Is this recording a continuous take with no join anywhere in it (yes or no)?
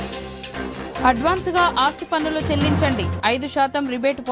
no